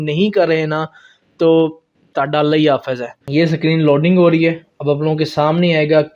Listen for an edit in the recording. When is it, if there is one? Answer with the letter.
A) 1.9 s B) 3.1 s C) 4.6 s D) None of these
B